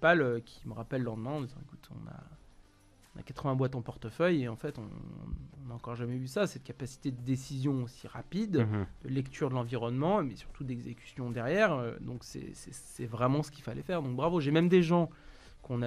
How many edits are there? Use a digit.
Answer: 0